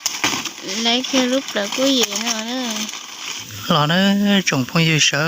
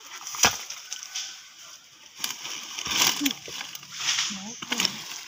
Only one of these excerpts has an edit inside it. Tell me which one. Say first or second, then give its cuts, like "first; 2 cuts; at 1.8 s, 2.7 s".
first; 1 cut; at 3.7 s